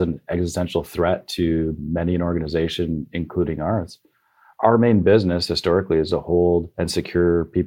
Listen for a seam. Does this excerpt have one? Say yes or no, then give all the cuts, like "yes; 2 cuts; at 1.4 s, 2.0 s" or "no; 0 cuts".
yes; 2 cuts; at 4.6 s, 6.8 s